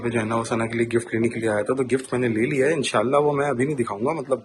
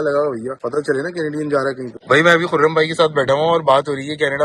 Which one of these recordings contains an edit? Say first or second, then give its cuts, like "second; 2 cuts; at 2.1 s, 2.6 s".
second; 1 cut; at 1.9 s